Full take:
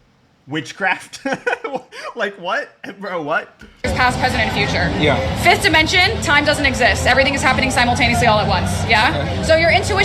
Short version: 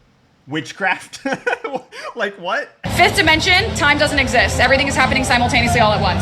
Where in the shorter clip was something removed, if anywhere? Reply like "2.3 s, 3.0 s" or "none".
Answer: 2.9 s